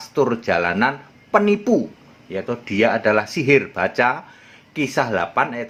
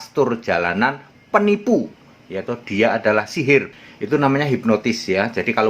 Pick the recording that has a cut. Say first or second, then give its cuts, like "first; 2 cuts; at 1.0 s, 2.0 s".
second; 1 cut; at 3.7 s